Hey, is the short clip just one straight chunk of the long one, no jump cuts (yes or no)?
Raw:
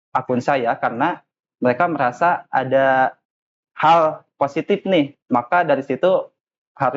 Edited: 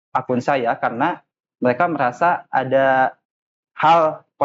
yes